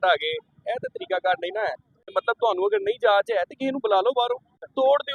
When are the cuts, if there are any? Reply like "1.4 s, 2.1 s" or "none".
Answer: 2.1 s